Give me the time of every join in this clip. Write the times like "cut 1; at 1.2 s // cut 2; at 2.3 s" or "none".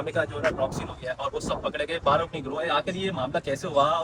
none

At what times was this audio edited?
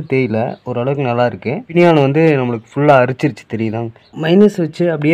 cut 1; at 1.7 s // cut 2; at 4.1 s

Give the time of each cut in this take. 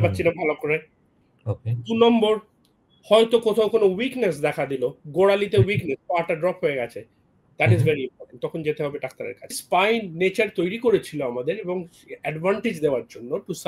cut 1; at 9.6 s

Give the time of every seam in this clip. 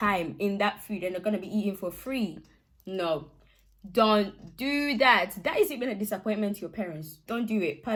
none

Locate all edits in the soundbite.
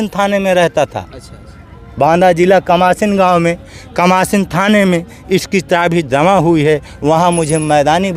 none

